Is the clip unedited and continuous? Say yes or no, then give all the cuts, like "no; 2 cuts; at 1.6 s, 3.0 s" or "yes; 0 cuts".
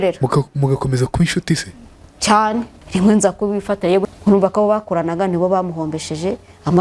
no; 2 cuts; at 2.8 s, 4.1 s